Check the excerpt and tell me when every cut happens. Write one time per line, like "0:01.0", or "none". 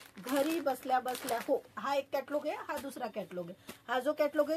0:01.7